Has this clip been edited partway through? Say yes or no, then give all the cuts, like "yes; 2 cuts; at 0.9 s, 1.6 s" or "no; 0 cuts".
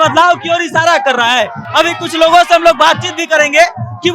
no; 0 cuts